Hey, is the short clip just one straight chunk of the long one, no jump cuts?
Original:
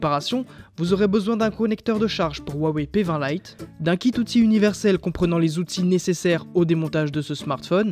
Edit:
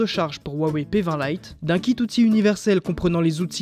no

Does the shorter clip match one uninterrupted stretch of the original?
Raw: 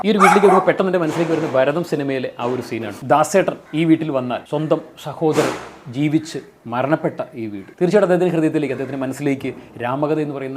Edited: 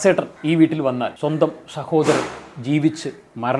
yes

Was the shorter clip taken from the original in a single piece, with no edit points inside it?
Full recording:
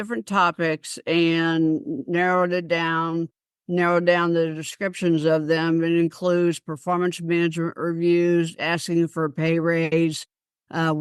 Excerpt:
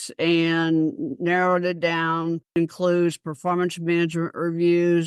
no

